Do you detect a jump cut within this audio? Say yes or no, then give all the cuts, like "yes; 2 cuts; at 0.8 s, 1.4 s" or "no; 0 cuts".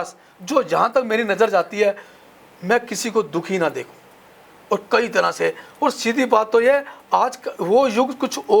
no; 0 cuts